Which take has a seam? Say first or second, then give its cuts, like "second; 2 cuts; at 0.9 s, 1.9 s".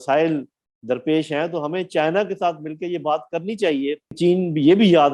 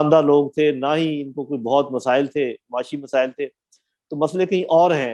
first; 1 cut; at 4.1 s